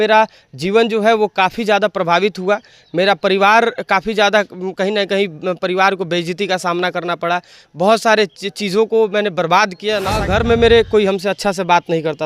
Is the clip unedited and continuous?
no; 1 cut; at 10.2 s

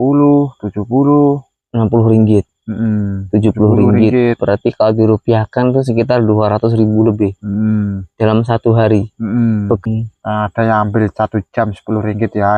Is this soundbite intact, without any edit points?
no; 1 cut; at 9.8 s

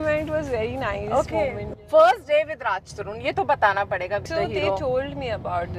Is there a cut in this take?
yes; 2 cuts; at 1.7 s, 4.3 s

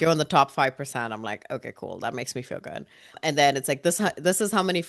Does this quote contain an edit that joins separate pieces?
no; 0 cuts

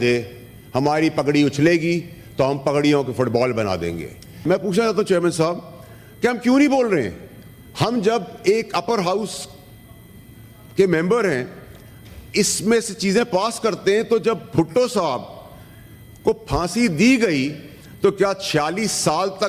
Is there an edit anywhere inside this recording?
yes; 1 cut; at 4.4 s

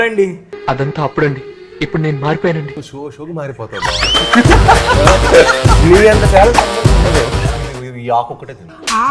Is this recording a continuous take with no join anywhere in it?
no; 1 cut; at 7.5 s

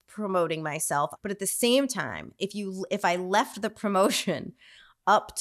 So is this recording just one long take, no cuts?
no; 1 cut; at 1.1 s

